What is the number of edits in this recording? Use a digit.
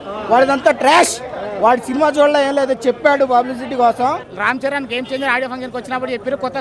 1